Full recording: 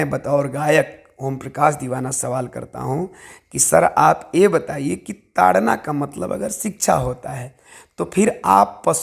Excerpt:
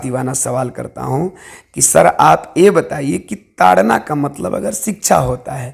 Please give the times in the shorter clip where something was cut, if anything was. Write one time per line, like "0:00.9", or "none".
none